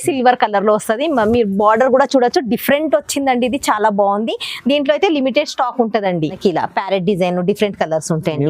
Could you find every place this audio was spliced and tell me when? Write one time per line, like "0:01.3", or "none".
0:06.4